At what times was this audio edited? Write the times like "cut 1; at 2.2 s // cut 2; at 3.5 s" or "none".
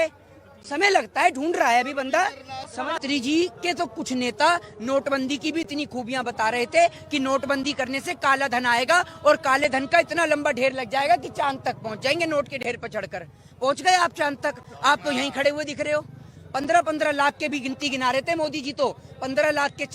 cut 1; at 3.0 s